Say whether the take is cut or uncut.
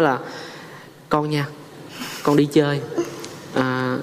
uncut